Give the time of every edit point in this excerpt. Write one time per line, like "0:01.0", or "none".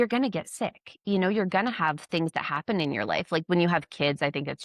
0:03.4

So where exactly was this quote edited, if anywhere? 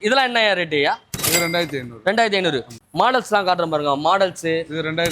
0:02.7

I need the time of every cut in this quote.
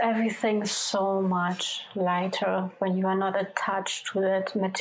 none

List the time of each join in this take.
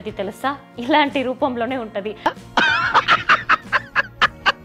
none

